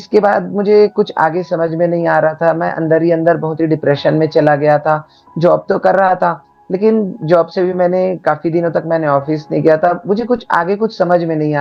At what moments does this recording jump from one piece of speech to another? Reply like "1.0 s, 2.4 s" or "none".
none